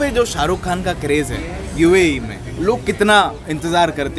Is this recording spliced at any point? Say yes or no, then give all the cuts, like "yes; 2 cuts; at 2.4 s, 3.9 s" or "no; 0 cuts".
yes; 1 cut; at 2.5 s